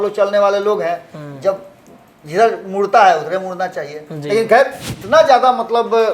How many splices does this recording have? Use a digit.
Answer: 1